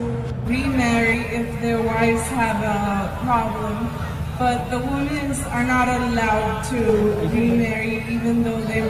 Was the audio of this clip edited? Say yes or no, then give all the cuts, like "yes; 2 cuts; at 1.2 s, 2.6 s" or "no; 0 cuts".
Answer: no; 0 cuts